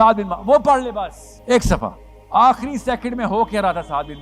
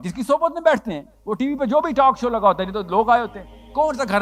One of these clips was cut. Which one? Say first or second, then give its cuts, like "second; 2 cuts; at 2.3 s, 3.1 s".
first; 2 cuts; at 1.3 s, 2.1 s